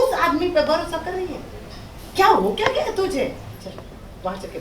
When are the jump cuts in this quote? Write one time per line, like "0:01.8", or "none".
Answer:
0:03.5